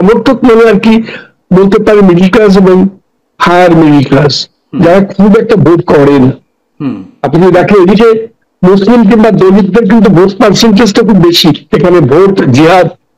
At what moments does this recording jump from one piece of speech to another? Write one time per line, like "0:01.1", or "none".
0:11.6